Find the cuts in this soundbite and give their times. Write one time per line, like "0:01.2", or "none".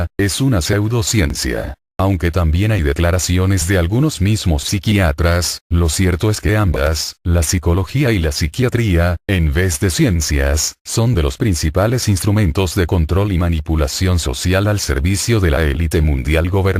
0:11.0